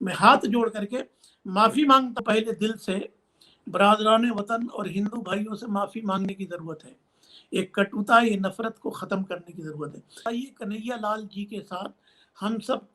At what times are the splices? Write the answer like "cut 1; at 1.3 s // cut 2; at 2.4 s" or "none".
cut 1; at 2.2 s // cut 2; at 10.2 s